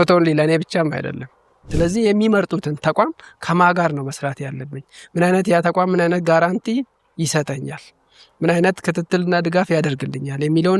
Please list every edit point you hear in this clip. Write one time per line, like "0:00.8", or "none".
0:01.6